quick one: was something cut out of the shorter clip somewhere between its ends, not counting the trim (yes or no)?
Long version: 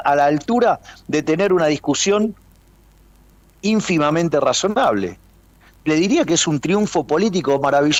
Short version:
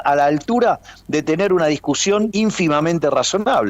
yes